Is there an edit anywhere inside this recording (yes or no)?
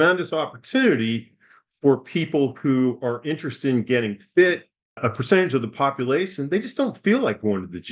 yes